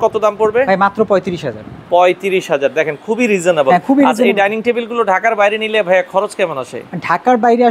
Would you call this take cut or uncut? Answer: uncut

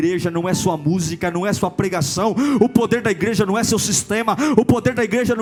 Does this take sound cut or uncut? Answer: uncut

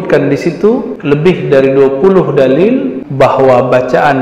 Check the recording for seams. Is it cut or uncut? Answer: cut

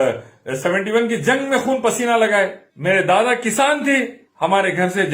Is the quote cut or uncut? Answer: cut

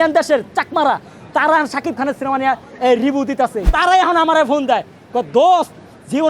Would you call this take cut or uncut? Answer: cut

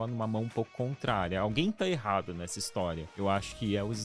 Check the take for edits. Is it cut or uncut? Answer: cut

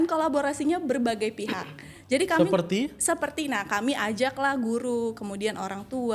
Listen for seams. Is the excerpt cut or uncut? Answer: uncut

